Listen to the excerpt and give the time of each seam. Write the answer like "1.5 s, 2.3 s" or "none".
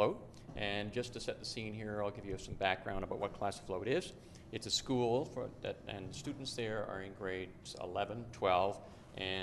2.9 s